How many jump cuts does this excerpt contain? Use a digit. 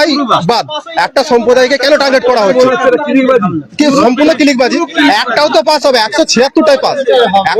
0